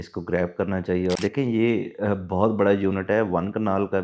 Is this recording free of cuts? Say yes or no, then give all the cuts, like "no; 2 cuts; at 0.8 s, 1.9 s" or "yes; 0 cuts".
no; 1 cut; at 1.2 s